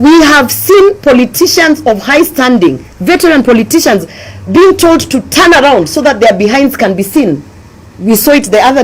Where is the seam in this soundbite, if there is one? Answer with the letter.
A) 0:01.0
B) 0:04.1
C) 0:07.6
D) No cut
D